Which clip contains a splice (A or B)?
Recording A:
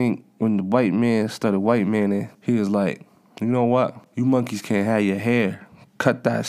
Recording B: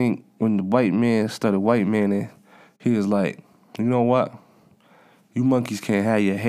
A